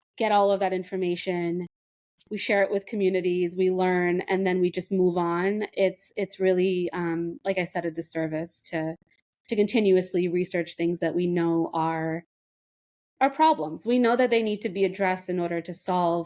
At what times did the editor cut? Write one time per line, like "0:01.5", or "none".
none